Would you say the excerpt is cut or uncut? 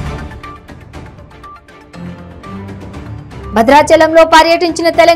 cut